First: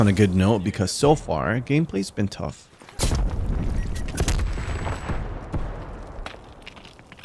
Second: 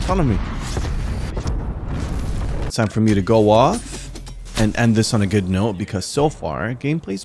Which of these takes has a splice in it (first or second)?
second